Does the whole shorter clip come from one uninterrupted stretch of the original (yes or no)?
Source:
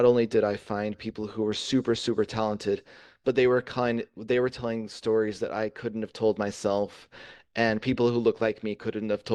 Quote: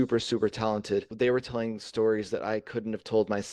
no